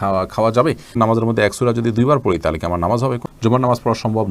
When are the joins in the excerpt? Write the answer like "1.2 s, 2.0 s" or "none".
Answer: 0.9 s, 3.3 s